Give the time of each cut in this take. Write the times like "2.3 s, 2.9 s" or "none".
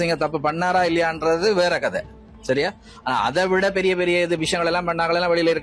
none